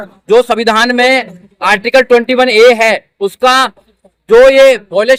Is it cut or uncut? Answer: uncut